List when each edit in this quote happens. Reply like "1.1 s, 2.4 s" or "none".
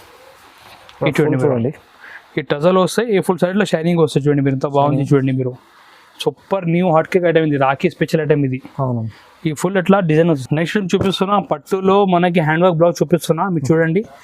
10.2 s